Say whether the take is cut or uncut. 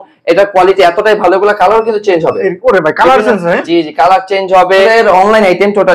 cut